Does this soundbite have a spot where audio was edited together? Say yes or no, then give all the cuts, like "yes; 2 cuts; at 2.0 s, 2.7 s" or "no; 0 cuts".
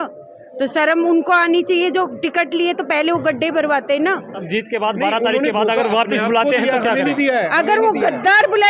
yes; 1 cut; at 4.4 s